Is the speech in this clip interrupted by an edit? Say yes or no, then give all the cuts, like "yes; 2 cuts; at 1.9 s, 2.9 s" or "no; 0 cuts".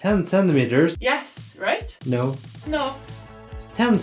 yes; 2 cuts; at 1.0 s, 1.9 s